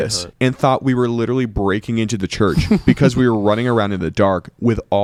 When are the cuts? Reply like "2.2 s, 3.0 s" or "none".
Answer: none